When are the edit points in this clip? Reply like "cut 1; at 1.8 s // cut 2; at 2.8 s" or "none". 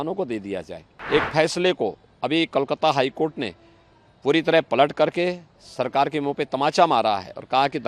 cut 1; at 0.9 s